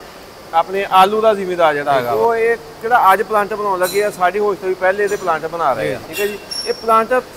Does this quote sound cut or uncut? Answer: cut